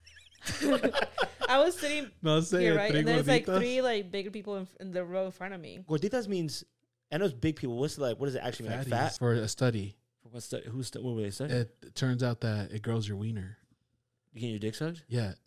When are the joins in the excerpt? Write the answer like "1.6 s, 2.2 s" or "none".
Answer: 9.1 s